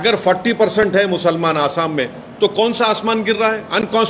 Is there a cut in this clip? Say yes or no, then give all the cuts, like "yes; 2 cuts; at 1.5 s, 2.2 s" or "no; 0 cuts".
no; 0 cuts